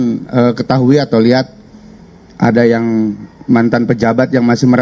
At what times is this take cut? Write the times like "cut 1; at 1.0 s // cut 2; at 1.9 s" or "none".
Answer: none